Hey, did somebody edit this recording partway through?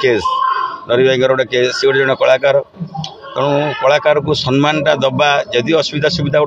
no; 0 cuts

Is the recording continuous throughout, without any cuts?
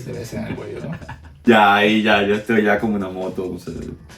no; 1 cut; at 1.5 s

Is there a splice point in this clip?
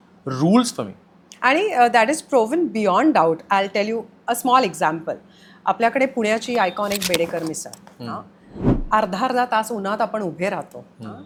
no; 0 cuts

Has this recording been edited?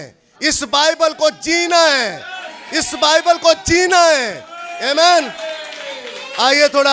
no; 0 cuts

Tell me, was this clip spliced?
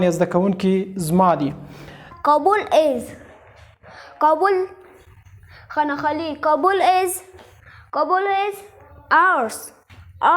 yes; 1 cut; at 2.1 s

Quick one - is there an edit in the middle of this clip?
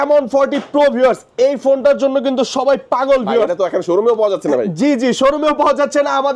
no; 0 cuts

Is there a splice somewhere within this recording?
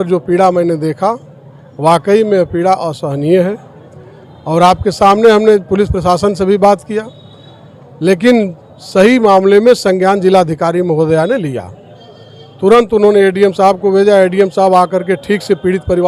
no; 0 cuts

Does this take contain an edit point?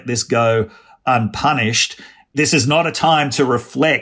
yes; 1 cut; at 2.1 s

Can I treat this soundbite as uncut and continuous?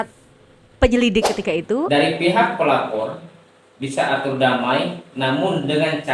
no; 1 cut; at 1.9 s

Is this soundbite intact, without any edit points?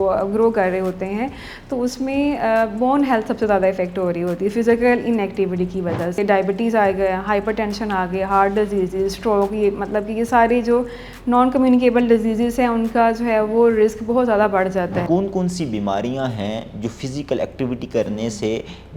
no; 2 cuts; at 6.2 s, 15.0 s

